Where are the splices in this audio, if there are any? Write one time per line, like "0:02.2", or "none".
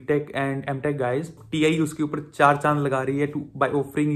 0:01.4